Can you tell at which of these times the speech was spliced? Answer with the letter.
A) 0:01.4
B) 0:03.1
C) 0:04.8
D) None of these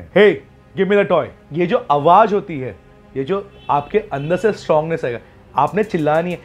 A